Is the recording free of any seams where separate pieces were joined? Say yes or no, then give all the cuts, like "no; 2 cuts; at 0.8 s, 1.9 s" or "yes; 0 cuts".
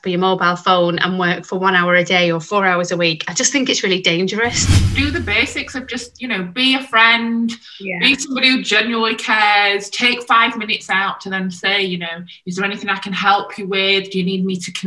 no; 1 cut; at 4.9 s